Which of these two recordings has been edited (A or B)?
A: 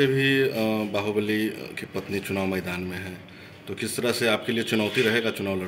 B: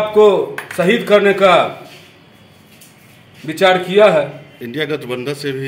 B